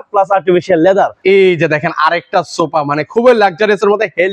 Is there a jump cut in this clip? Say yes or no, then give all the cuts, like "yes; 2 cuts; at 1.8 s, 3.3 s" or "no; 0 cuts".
yes; 1 cut; at 1.2 s